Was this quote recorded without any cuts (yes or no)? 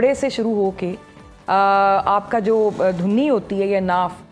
yes